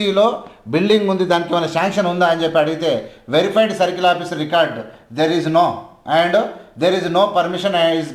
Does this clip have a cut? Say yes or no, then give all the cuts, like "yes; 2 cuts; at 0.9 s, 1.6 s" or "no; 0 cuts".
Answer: no; 0 cuts